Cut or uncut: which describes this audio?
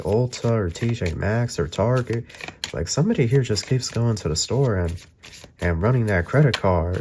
uncut